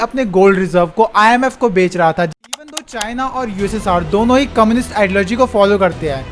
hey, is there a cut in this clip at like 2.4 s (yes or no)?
yes